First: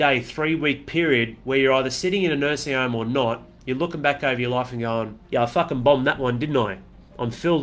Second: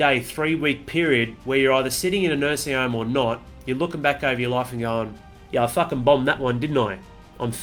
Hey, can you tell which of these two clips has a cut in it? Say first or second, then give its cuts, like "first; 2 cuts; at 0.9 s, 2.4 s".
first; 1 cut; at 5.2 s